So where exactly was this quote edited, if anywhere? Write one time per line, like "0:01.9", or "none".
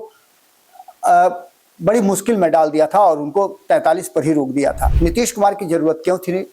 0:04.9